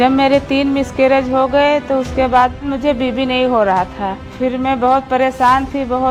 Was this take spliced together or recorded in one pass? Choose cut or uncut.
uncut